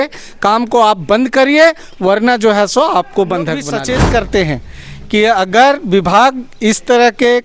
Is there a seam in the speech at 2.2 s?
no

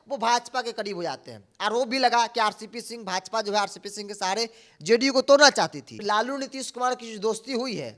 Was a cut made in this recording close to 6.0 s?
yes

